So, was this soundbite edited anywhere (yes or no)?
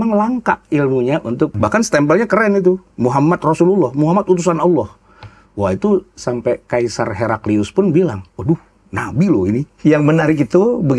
yes